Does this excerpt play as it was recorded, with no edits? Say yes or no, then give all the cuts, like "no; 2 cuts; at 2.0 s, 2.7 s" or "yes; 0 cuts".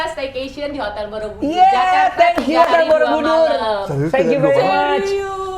yes; 0 cuts